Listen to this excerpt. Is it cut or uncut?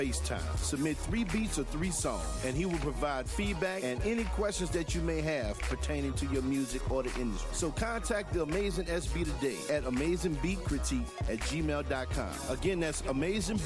uncut